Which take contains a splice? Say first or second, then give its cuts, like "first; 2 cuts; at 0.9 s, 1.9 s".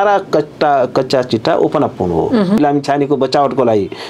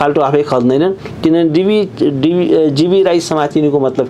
first; 1 cut; at 2.6 s